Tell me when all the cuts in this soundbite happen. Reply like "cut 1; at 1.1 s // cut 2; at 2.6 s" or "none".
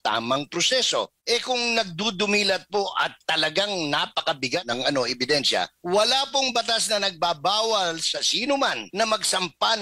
cut 1; at 1.2 s // cut 2; at 4.6 s // cut 3; at 5.8 s // cut 4; at 8.8 s